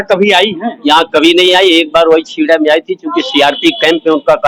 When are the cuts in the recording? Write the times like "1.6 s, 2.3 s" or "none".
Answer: none